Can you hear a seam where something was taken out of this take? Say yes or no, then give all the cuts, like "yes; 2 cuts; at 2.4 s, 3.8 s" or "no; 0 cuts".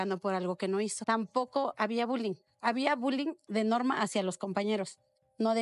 yes; 1 cut; at 1.0 s